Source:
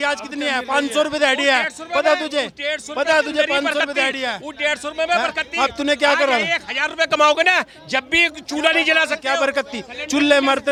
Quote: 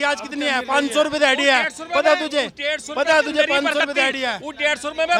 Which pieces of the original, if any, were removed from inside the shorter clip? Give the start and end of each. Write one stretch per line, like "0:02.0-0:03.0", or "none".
none